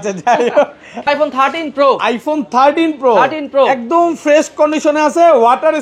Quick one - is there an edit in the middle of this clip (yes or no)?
yes